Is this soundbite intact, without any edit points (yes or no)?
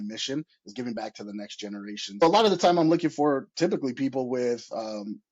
no